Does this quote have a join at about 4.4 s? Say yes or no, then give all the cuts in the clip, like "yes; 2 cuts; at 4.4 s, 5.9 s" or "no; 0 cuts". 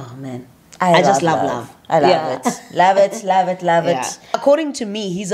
yes; 1 cut; at 4.4 s